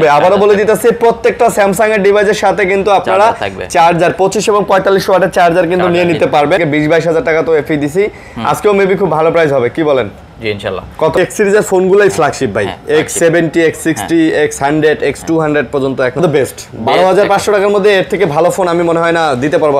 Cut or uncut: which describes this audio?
cut